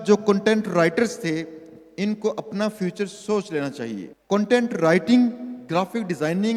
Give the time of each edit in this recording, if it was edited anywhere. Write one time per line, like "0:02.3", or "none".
0:04.1